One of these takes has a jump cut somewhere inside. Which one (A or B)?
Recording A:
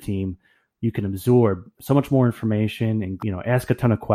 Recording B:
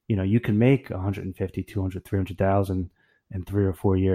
A